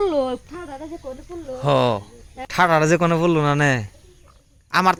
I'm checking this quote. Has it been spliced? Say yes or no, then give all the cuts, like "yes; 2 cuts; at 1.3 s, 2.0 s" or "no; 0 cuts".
no; 0 cuts